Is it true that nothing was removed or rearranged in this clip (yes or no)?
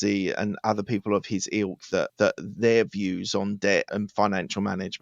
yes